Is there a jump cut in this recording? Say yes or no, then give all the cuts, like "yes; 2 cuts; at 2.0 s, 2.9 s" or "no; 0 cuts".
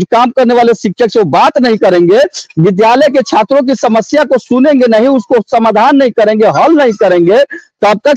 no; 0 cuts